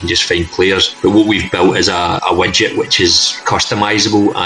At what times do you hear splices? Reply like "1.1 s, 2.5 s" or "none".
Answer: 0.9 s, 2.2 s, 3.4 s